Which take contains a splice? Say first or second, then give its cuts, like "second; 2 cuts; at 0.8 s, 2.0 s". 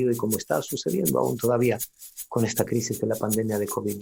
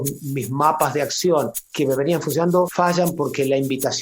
second; 2 cuts; at 1.6 s, 2.7 s